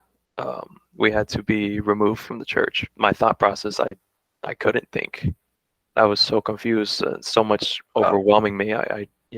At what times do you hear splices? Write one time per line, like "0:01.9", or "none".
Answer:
0:02.8